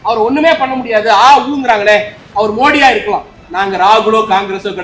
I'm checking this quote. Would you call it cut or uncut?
cut